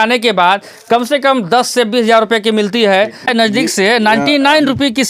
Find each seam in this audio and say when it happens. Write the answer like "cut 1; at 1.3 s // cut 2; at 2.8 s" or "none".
cut 1; at 3.3 s